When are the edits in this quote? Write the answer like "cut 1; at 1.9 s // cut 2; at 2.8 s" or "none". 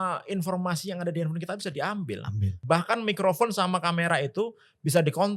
cut 1; at 2.6 s